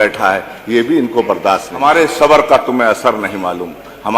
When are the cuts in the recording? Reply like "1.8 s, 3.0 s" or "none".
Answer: 1.7 s